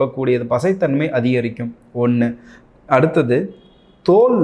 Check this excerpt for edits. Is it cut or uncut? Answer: uncut